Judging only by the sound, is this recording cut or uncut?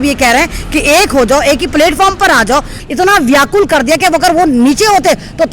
cut